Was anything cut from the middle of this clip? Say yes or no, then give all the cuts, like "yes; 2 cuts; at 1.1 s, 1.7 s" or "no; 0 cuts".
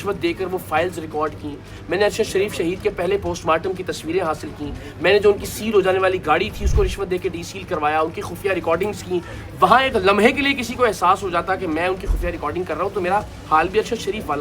no; 0 cuts